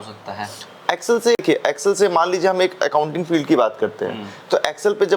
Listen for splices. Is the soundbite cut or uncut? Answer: cut